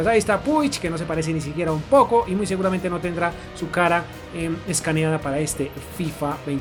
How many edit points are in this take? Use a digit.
0